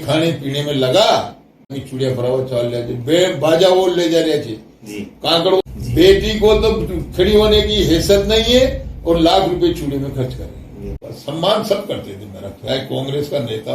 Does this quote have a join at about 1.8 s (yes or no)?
yes